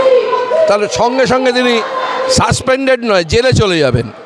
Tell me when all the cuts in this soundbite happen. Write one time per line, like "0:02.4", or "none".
none

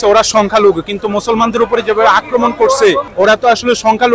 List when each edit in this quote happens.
0:03.1

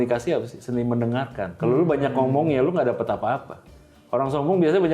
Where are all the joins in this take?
0:01.4

